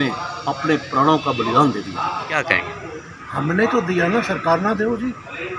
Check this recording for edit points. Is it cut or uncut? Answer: cut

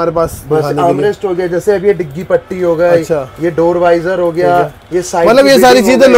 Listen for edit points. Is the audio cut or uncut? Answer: uncut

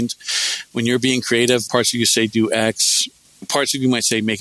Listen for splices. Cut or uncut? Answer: cut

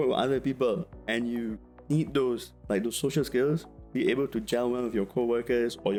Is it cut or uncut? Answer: uncut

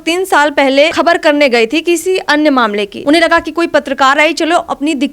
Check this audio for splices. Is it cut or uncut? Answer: cut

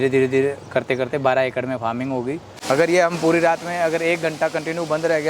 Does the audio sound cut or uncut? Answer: cut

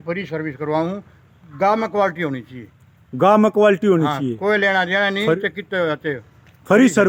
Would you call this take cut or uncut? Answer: uncut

